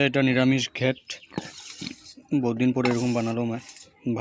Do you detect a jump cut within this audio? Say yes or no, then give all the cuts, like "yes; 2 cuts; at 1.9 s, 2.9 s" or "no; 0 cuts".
no; 0 cuts